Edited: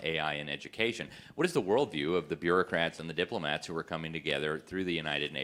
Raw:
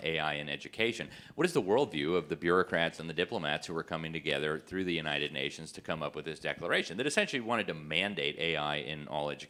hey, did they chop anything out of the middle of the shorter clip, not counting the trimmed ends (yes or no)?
no